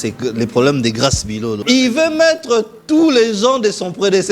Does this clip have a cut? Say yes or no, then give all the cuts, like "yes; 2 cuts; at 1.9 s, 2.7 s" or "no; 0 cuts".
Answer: yes; 1 cut; at 1.6 s